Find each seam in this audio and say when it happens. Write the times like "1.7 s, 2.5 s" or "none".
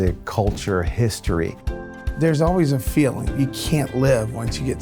1.9 s